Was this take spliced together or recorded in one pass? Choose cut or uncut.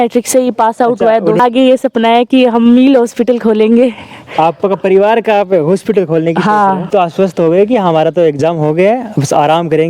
cut